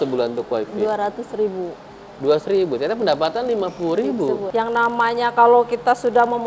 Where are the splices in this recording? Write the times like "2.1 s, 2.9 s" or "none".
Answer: 4.5 s